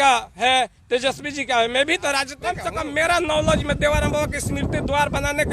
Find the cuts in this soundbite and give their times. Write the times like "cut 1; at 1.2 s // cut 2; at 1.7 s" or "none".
cut 1; at 2.6 s